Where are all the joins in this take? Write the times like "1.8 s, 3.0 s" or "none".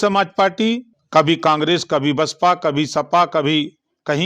0.9 s